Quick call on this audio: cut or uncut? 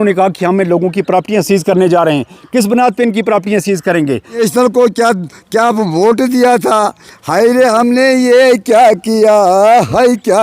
cut